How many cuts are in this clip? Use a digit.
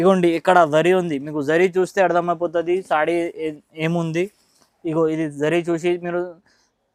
0